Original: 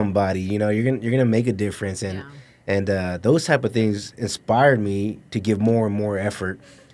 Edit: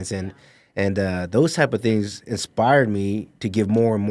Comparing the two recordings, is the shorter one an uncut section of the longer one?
yes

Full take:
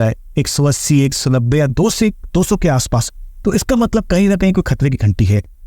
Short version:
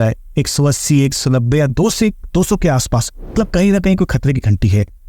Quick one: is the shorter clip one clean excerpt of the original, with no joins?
no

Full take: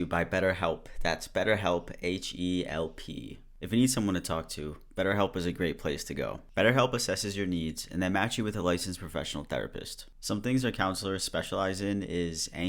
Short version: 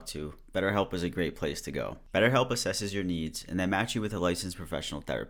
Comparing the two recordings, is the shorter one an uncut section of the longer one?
yes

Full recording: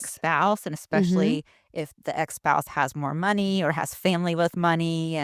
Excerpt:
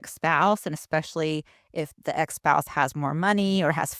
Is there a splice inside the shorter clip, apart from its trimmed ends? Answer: no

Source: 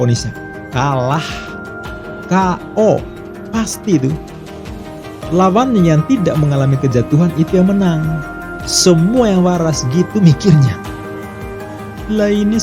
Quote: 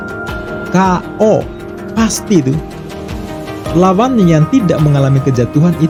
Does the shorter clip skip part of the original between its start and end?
no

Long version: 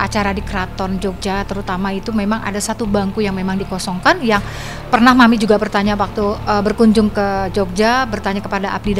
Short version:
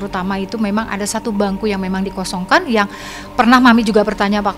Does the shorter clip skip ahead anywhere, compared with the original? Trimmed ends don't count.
no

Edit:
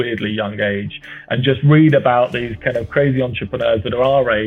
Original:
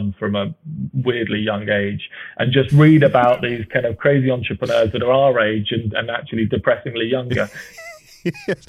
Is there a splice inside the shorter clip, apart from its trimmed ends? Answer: no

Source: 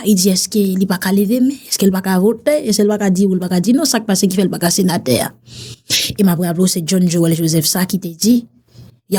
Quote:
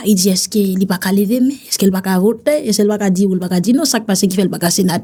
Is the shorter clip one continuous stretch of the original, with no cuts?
yes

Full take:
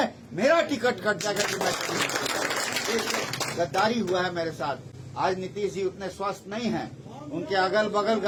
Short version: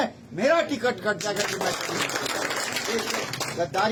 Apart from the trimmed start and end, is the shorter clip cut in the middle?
no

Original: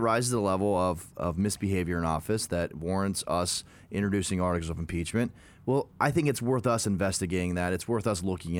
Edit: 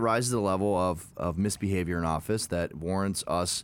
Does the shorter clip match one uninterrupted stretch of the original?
yes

